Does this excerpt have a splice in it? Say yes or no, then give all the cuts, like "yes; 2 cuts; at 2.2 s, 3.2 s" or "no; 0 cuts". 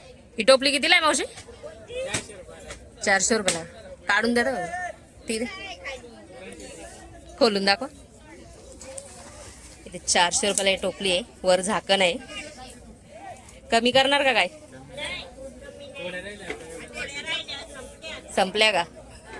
no; 0 cuts